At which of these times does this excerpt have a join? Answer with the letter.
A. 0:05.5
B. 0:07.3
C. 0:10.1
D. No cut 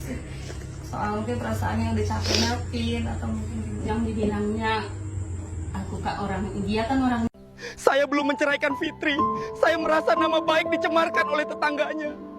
B